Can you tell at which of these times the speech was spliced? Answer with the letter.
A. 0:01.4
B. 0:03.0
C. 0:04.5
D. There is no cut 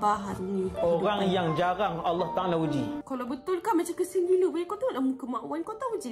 B